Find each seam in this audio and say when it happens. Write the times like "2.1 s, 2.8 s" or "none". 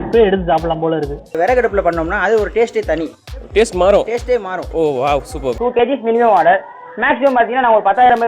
1.2 s, 5.5 s